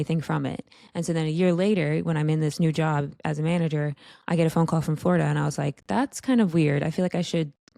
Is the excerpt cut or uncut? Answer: uncut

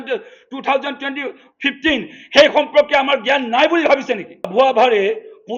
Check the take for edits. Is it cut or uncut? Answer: cut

